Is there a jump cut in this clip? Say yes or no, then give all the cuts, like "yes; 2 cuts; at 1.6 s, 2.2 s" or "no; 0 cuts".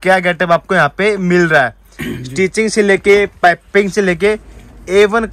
no; 0 cuts